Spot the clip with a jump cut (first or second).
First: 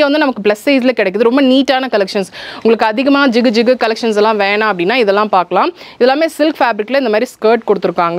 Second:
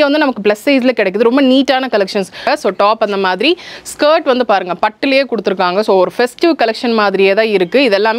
second